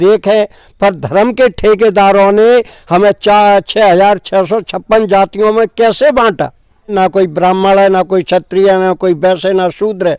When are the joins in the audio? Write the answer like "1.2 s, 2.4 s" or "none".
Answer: 6.9 s